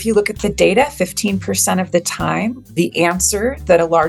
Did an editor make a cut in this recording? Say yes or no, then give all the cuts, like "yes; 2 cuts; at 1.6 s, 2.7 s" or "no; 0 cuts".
yes; 1 cut; at 2.7 s